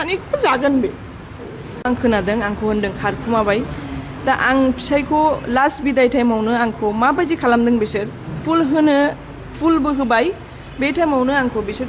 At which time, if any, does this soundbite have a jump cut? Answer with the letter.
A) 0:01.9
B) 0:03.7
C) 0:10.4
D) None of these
A